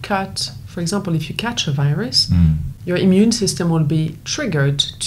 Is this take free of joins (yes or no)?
no